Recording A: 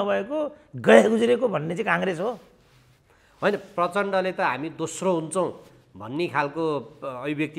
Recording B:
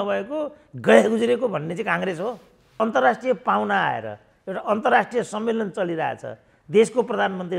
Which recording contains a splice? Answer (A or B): B